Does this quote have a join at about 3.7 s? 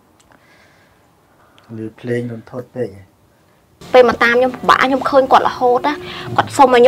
yes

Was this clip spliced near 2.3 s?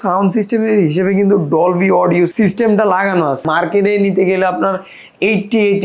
yes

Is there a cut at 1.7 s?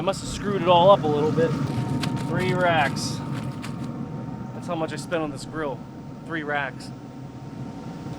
yes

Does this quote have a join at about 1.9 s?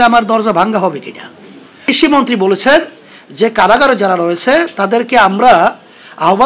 yes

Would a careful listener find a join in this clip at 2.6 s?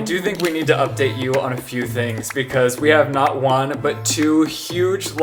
no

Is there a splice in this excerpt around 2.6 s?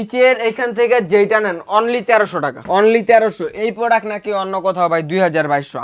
yes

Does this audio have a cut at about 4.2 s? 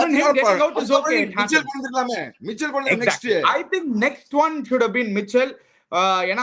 no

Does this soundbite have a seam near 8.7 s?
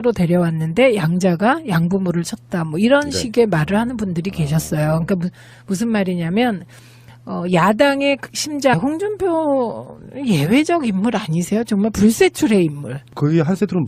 no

